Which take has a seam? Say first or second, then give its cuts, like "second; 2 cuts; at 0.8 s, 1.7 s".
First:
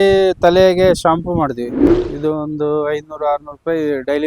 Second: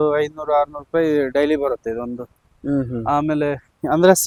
first; 1 cut; at 1.8 s